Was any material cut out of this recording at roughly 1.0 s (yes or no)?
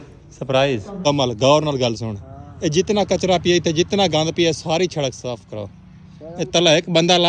yes